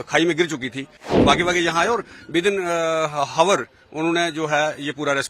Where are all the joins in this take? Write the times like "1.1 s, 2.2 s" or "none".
1.0 s